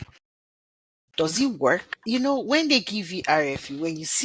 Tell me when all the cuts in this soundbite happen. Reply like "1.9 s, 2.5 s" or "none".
1.9 s